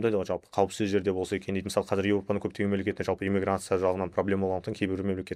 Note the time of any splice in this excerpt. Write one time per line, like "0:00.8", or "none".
none